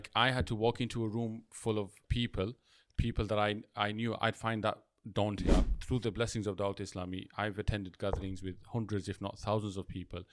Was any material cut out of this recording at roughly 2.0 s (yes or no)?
yes